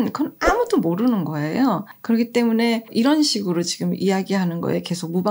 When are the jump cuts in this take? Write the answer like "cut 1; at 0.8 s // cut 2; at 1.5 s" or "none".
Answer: cut 1; at 1.9 s // cut 2; at 2.9 s